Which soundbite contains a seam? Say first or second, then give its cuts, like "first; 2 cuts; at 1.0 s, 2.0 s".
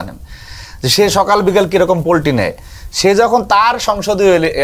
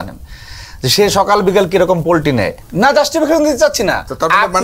second; 1 cut; at 2.6 s